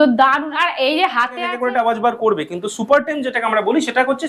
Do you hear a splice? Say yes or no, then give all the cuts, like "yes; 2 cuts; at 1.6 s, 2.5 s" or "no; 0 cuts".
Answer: yes; 1 cut; at 1.5 s